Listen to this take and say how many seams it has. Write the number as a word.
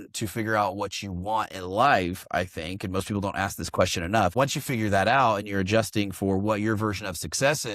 one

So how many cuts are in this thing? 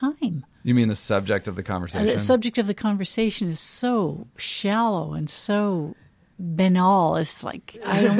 zero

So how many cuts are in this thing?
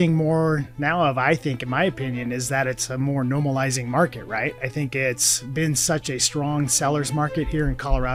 zero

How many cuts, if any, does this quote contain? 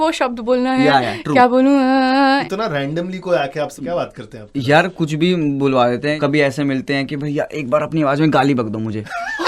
three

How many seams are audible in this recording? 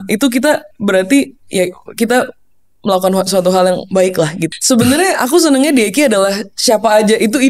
one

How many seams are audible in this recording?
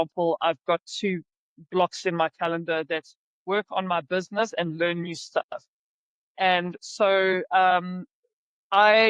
zero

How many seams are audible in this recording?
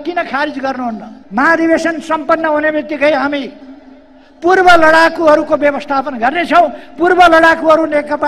one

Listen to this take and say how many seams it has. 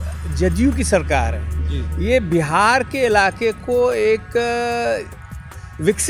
zero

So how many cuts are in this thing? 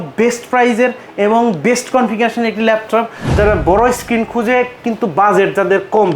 one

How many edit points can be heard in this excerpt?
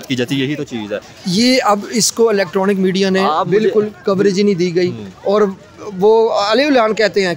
one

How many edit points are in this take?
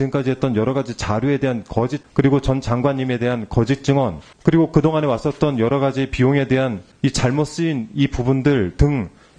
three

